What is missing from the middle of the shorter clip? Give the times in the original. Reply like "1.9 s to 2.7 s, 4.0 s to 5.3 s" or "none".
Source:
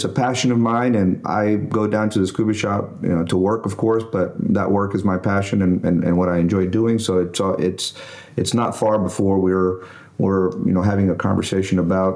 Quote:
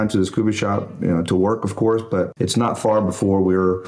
4.3 s to 8.3 s